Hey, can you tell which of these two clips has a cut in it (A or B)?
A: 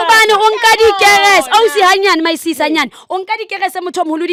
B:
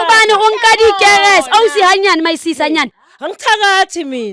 B